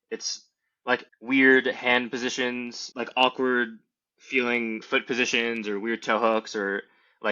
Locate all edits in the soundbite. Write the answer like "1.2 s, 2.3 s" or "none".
1.1 s, 2.8 s, 4.8 s